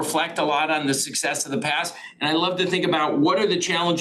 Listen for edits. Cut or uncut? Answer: uncut